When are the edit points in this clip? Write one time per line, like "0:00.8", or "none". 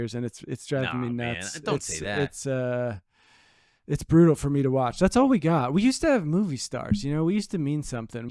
none